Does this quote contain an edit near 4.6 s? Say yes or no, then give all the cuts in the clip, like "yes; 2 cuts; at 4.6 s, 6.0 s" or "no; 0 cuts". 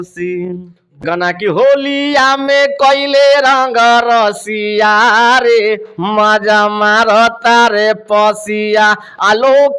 no; 1 cut; at 1.0 s